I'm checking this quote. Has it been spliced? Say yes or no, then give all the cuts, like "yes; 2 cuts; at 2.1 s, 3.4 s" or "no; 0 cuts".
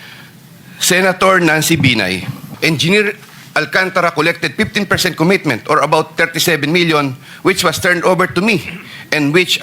yes; 1 cut; at 2.4 s